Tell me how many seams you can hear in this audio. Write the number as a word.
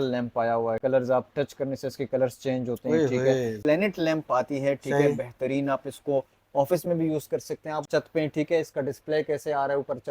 three